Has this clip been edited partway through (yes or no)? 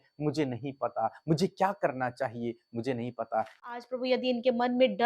yes